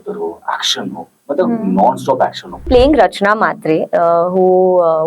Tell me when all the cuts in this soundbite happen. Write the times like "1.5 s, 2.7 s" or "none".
2.7 s